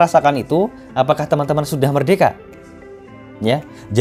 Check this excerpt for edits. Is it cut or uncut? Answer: uncut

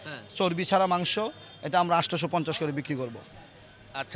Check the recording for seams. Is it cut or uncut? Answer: uncut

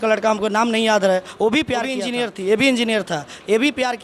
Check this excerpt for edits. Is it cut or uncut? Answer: cut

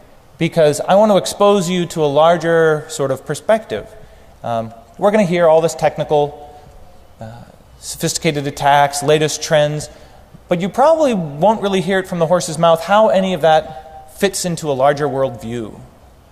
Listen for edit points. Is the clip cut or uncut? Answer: uncut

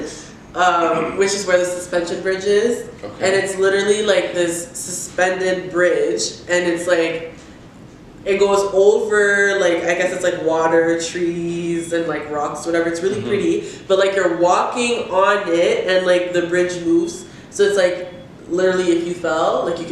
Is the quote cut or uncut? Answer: uncut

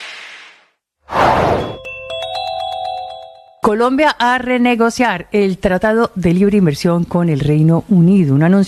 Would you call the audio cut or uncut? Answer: uncut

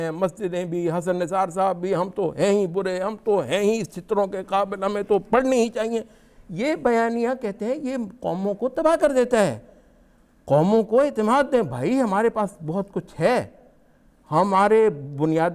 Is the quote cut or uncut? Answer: uncut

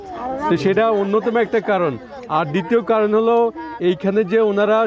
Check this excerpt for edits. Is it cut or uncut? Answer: uncut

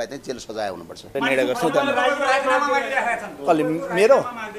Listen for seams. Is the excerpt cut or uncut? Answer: cut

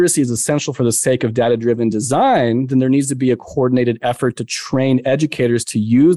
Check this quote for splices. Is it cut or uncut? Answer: uncut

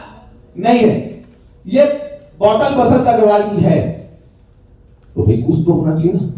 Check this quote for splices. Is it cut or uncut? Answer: uncut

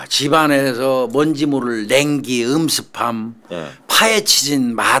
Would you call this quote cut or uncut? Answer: uncut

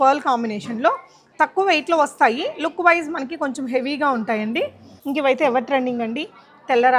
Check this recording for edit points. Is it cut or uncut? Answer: cut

